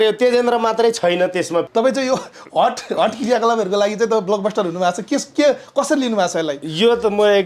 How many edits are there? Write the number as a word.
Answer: one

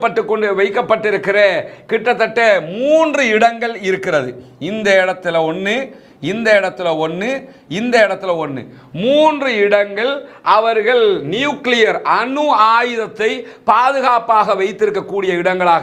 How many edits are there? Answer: zero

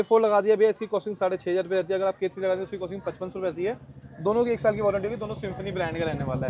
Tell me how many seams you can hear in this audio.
zero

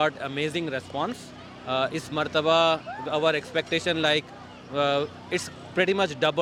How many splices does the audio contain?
zero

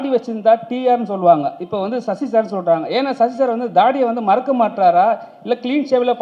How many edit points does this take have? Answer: zero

